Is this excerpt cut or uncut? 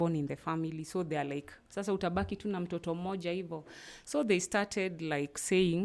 uncut